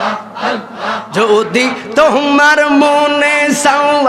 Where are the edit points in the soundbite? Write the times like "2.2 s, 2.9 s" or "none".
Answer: 1.0 s